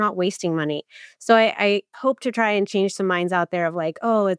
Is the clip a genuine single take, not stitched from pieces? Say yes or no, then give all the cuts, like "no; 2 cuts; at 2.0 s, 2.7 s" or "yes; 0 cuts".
no; 1 cut; at 1.9 s